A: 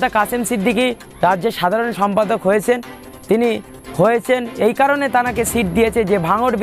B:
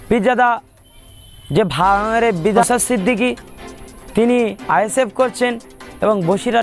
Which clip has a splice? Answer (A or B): B